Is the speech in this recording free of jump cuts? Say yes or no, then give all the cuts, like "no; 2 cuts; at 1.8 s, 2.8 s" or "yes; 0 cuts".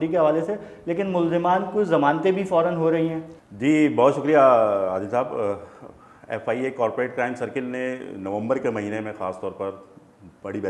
yes; 0 cuts